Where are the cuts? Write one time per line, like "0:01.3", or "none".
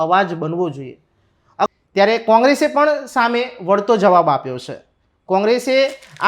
0:01.7

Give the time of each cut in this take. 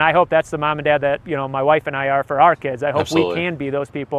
none

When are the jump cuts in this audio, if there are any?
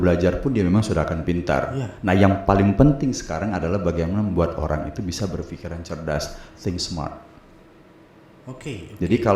none

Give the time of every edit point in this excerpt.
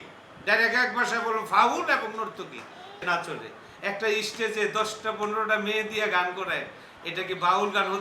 0:03.0

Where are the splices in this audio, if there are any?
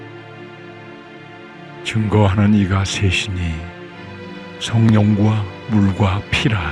0:01.9

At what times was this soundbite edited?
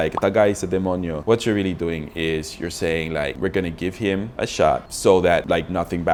none

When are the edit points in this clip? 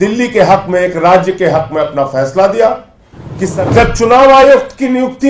0:03.5

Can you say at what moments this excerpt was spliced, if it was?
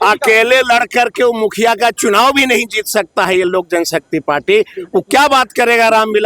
none

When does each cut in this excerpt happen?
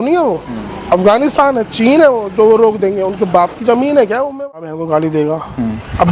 0:04.4

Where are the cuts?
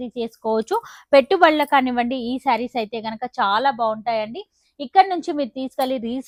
none

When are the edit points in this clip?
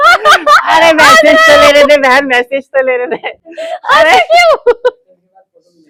none

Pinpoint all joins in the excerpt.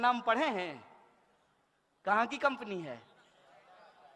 none

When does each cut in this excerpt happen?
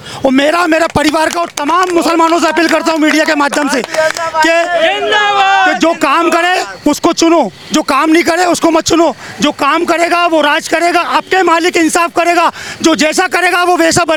none

